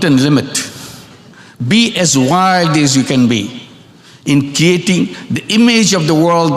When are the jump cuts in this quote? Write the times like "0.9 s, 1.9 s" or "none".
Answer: none